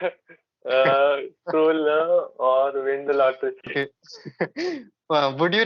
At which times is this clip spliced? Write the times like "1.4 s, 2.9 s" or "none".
3.7 s